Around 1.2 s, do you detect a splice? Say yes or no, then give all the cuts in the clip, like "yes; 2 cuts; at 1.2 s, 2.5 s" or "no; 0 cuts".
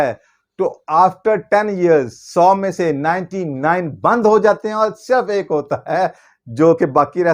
no; 0 cuts